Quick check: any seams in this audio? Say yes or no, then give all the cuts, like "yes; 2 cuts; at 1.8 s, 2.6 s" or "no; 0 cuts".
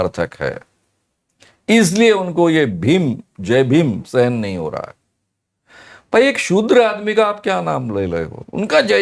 no; 0 cuts